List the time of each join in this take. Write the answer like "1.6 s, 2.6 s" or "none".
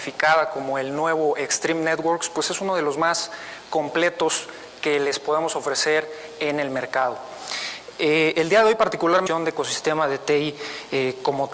none